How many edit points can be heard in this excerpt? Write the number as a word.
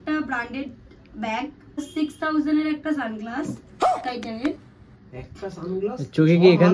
one